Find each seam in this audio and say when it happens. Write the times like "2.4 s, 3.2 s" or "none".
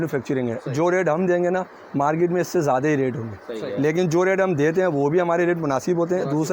none